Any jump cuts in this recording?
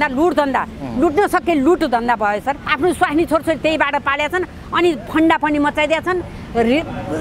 yes; 1 cut; at 2.6 s

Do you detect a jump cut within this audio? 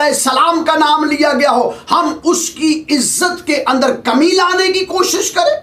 no; 0 cuts

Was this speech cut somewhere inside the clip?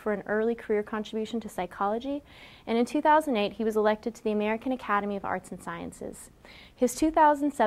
no; 0 cuts

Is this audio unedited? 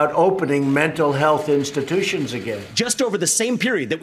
no; 1 cut; at 2.6 s

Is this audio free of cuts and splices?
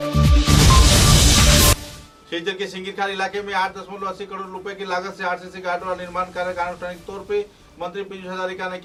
yes; 0 cuts

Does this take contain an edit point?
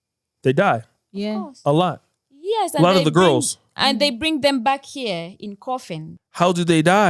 yes; 1 cut; at 6.2 s

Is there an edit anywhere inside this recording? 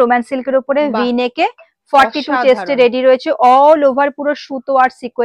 no; 0 cuts

